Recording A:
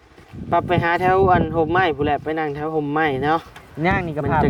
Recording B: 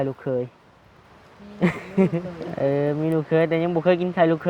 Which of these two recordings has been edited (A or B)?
B